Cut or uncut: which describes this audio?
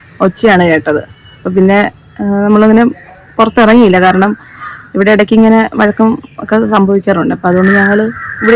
uncut